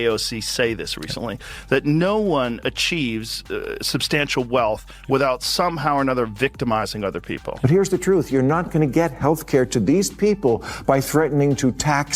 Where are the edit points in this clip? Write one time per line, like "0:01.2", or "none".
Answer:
0:07.5